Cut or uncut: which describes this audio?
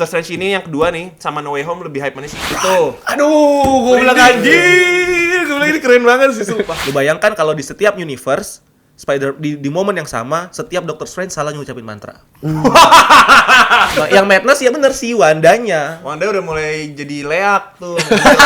cut